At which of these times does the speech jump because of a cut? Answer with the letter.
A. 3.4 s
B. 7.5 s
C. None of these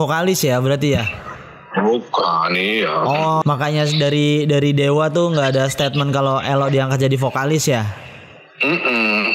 A